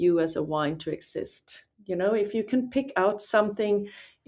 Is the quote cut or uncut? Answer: uncut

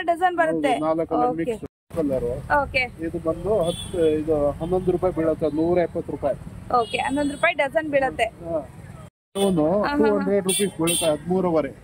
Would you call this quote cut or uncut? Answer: cut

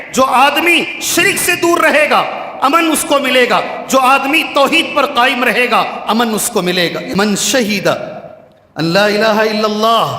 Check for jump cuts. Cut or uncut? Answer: cut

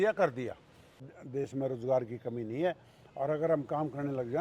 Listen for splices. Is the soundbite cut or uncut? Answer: cut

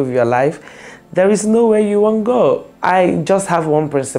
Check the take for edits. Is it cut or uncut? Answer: cut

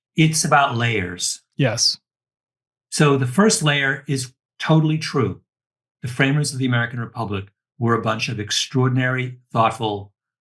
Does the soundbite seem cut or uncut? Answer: uncut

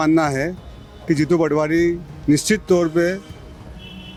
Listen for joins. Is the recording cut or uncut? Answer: uncut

